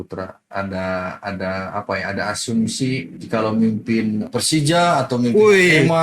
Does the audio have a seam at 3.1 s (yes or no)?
yes